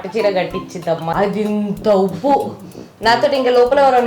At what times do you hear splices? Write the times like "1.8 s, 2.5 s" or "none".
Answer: 1.1 s